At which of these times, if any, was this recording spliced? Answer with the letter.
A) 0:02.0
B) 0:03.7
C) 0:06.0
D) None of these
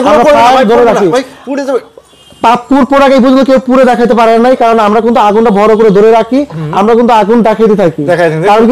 D